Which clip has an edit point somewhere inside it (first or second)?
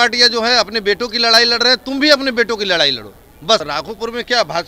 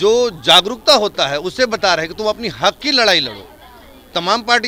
first